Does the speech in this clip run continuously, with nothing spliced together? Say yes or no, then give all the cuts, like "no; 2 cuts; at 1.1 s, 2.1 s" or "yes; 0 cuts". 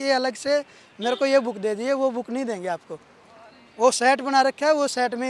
yes; 0 cuts